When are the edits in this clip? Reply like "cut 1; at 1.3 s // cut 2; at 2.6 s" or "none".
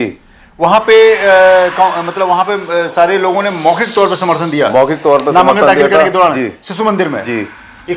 none